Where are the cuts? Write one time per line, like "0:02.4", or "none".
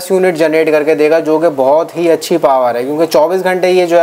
none

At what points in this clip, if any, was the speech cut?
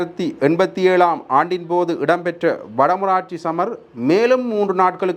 none

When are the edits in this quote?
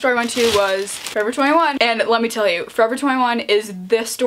0:01.0

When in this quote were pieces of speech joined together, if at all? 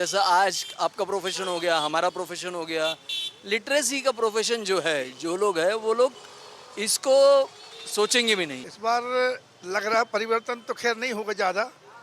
0:08.6

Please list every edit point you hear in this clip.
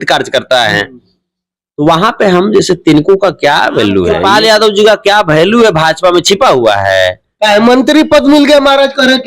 0:04.1

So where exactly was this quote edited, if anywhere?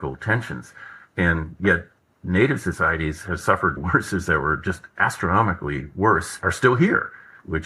0:03.8

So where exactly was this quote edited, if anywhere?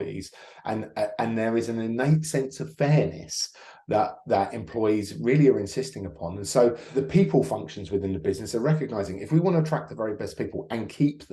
0:06.9

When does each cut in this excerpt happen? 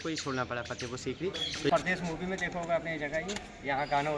0:01.7

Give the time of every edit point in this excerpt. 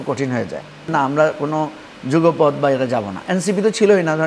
0:00.9

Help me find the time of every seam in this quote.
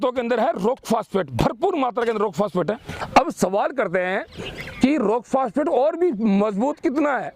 0:02.9

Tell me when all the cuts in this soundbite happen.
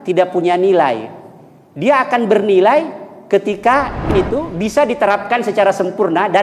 0:04.1

